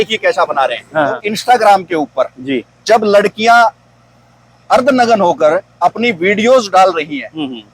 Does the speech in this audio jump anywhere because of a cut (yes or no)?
yes